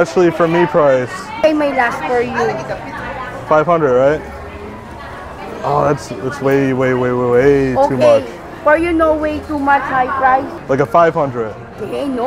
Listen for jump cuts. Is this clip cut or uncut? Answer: cut